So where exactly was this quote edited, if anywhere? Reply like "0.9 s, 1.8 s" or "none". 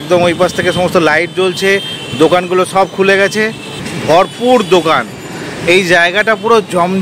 3.7 s